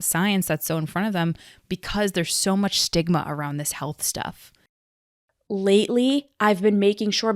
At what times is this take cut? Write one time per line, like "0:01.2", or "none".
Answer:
0:05.0